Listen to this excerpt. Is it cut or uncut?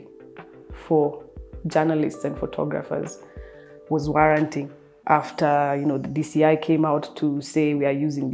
uncut